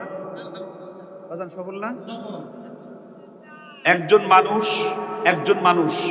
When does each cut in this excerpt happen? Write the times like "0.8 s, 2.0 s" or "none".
none